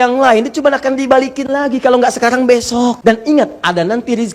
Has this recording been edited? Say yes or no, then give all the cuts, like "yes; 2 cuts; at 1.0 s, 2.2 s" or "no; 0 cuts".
yes; 1 cut; at 3.0 s